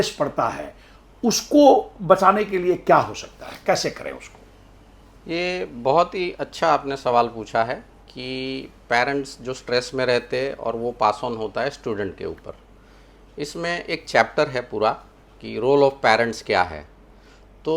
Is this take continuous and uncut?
yes; 0 cuts

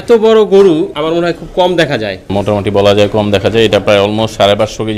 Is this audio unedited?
no; 2 cuts; at 0.9 s, 2.3 s

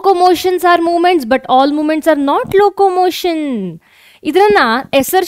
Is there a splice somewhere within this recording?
no; 0 cuts

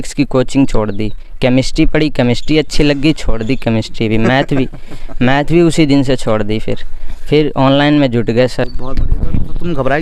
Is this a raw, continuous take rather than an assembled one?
no; 1 cut; at 8.8 s

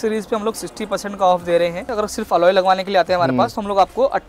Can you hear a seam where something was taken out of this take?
yes; 1 cut; at 1.9 s

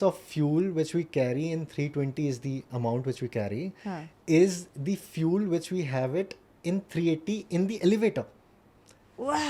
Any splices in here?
no; 0 cuts

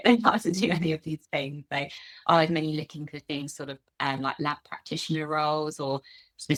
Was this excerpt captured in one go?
yes; 0 cuts

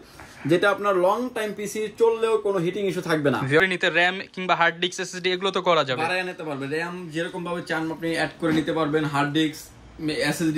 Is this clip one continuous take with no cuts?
no; 1 cut; at 3.6 s

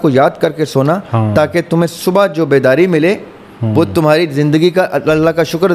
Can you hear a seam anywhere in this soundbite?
no; 0 cuts

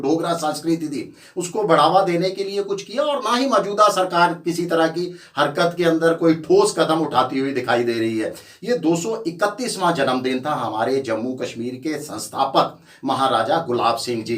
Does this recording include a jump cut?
no; 0 cuts

